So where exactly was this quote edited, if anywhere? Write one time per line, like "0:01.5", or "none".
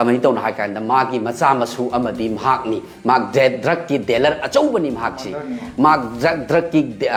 none